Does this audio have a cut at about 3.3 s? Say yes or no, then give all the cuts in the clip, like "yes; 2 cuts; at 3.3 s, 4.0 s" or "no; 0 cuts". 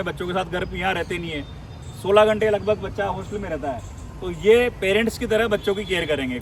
no; 0 cuts